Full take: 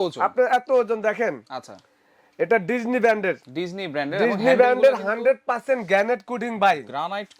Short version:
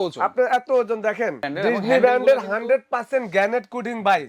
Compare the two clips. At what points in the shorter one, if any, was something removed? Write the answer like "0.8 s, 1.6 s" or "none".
1.4 s